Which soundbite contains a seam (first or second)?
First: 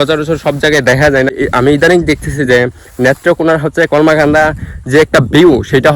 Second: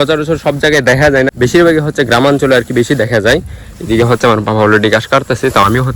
first